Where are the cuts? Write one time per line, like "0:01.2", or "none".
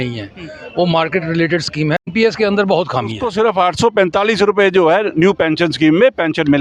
0:02.1
0:03.2